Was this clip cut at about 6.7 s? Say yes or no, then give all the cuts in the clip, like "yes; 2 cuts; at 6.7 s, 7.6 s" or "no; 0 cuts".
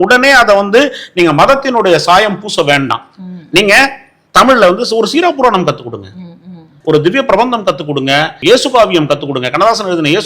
yes; 2 cuts; at 6.7 s, 8.4 s